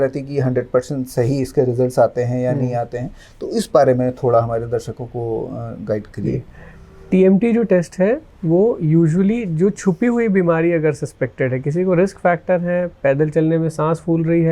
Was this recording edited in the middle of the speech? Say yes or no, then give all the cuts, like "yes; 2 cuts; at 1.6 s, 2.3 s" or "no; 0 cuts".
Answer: no; 0 cuts